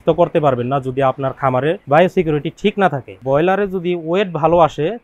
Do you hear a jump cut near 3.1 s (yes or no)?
yes